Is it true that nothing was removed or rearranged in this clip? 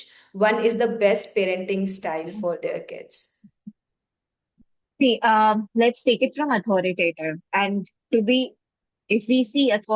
yes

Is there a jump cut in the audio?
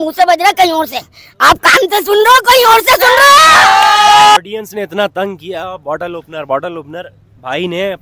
yes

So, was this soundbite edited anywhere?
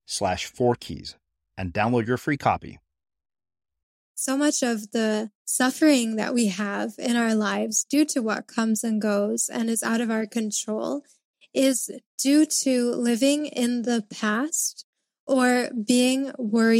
yes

